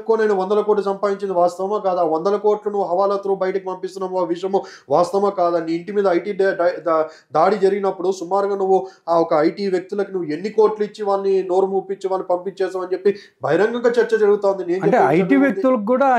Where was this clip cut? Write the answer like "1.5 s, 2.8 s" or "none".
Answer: none